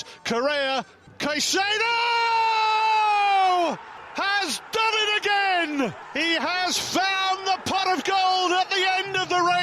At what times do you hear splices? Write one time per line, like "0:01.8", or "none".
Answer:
0:01.0
0:04.0
0:06.0